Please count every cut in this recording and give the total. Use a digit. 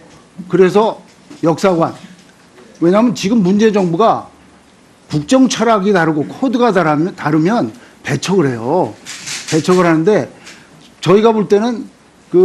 0